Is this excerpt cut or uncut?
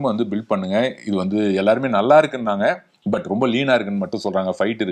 uncut